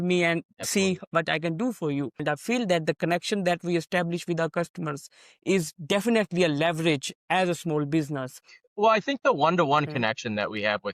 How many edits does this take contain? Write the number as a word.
two